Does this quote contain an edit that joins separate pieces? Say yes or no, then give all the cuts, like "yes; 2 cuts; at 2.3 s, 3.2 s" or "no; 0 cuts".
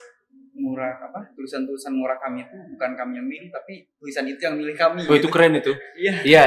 no; 0 cuts